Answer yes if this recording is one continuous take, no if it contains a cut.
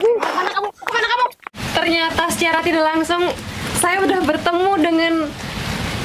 no